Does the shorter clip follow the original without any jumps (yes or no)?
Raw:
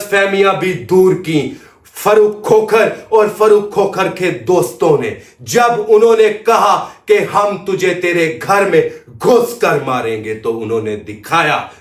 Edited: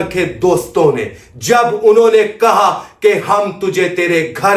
yes